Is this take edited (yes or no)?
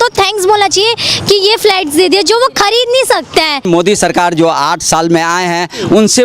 yes